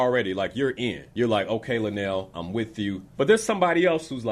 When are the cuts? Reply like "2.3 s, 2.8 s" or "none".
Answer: 1.0 s, 3.0 s